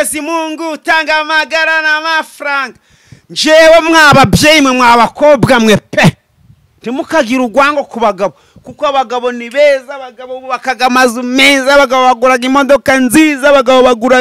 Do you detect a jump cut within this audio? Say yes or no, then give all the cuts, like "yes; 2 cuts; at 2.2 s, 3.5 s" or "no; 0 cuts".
no; 0 cuts